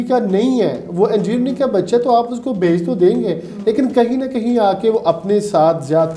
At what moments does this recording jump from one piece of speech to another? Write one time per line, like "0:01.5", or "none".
none